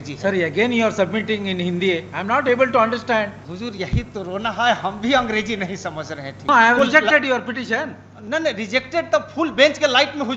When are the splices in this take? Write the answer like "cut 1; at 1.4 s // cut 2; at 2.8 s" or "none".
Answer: cut 1; at 3.4 s // cut 2; at 6.5 s